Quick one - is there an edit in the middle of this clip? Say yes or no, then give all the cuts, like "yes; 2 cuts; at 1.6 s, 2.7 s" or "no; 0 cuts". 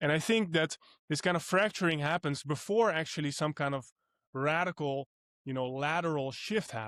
no; 0 cuts